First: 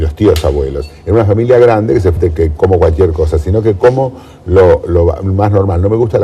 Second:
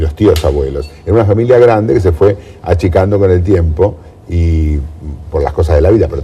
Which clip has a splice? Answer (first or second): second